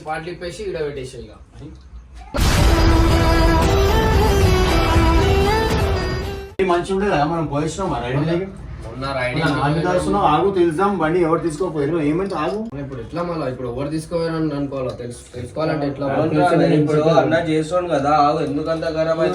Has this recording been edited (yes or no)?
no